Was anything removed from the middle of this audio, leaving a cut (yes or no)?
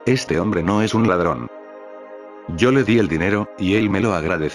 no